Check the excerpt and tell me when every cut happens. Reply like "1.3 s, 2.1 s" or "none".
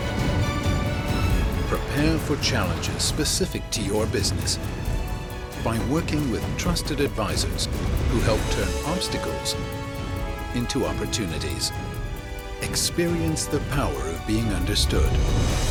none